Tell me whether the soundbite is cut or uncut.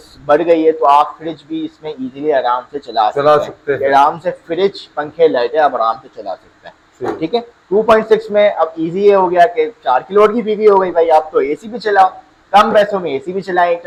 uncut